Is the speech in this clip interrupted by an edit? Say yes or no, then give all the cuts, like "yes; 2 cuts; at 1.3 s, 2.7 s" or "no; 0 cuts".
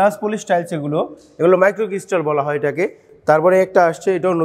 no; 0 cuts